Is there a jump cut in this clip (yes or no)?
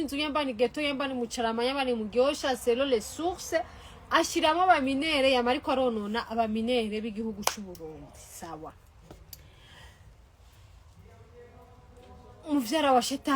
no